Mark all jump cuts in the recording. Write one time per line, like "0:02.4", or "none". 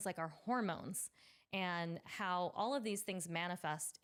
none